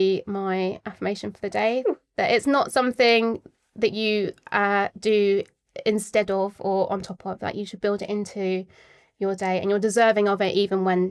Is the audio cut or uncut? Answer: uncut